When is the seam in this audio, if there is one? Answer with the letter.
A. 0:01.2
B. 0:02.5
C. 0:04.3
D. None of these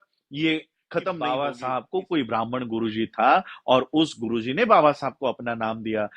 A